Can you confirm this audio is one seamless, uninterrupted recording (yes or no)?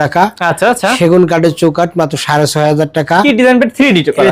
no